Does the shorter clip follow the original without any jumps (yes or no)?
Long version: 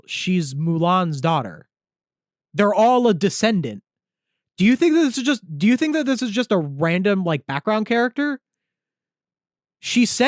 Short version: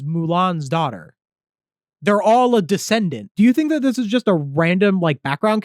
no